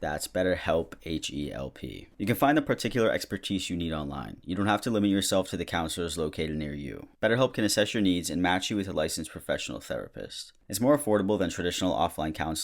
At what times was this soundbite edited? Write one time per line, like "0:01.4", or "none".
0:02.1
0:10.5